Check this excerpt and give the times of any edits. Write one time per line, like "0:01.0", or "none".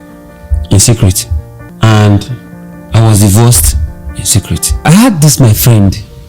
0:04.8